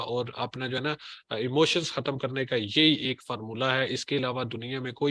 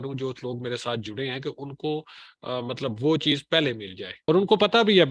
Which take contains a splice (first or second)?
second